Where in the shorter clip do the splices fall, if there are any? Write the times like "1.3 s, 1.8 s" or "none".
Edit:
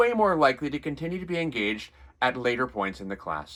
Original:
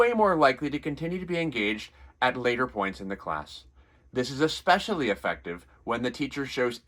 none